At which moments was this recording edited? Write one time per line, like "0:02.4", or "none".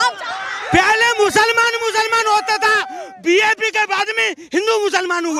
none